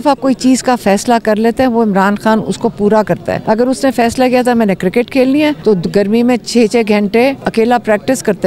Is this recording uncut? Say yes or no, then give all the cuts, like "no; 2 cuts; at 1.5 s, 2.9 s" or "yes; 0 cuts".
no; 3 cuts; at 3.4 s, 5.6 s, 7.4 s